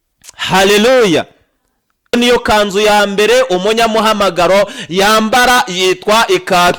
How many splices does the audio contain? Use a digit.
1